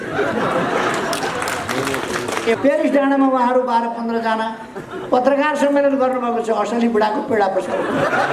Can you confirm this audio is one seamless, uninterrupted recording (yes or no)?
no